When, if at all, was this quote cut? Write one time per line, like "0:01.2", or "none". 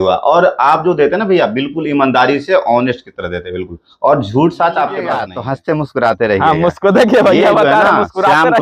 0:05.4